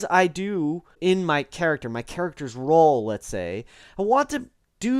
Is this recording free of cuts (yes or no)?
no